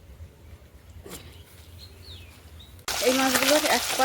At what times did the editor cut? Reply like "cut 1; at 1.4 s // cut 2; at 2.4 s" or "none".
cut 1; at 2.9 s